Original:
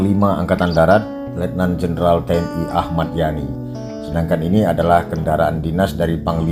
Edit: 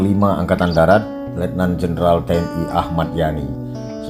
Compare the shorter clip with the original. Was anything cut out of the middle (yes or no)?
no